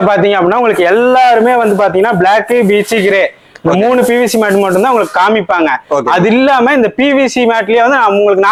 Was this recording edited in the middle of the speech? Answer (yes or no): no